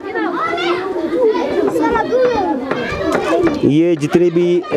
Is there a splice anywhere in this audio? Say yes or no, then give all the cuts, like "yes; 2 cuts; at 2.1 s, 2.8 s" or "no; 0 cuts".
no; 0 cuts